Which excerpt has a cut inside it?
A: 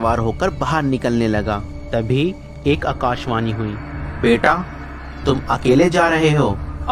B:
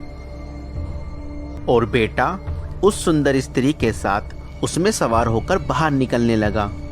B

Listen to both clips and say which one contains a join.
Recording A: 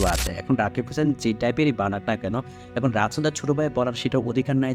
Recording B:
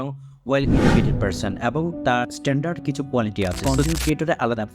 B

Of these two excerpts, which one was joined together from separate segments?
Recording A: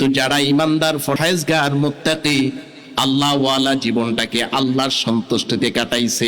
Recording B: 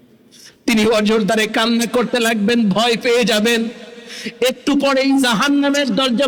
A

